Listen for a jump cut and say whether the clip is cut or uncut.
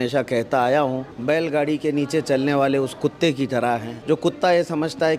cut